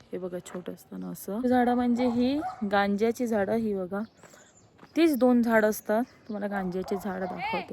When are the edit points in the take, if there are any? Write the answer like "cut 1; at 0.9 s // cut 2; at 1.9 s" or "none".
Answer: cut 1; at 1.4 s